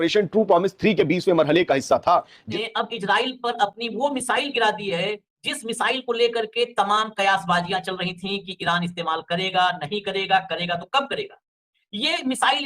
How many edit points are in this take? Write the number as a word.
one